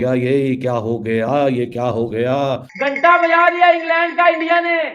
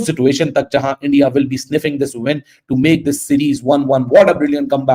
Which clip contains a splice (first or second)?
first